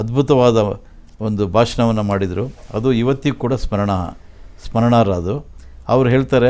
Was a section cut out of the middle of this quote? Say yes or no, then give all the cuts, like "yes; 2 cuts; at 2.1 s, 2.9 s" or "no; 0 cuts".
no; 0 cuts